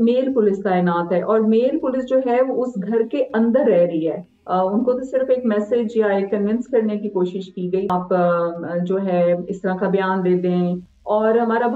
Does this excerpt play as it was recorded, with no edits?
no; 3 cuts; at 4.3 s, 7.9 s, 10.9 s

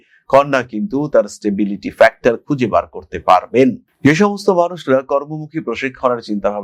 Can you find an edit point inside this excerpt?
no; 0 cuts

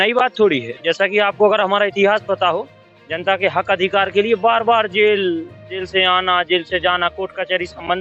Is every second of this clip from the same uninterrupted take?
yes; 0 cuts

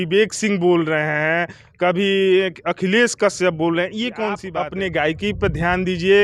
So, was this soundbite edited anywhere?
yes; 1 cut; at 4.4 s

